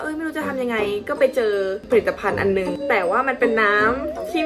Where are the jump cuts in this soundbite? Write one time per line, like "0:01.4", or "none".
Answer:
none